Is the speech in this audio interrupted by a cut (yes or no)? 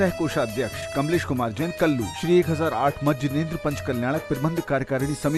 no